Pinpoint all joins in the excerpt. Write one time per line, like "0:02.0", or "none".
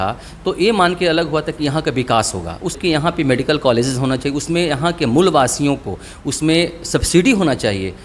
0:02.8